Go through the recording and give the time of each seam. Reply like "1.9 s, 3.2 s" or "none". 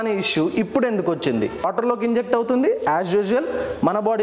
1.6 s